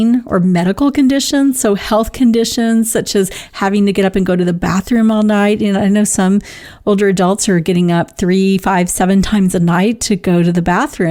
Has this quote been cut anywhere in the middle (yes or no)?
no